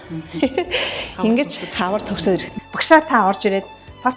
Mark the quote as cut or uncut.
cut